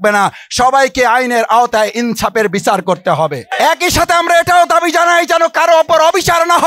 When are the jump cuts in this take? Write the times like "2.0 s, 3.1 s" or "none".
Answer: 3.5 s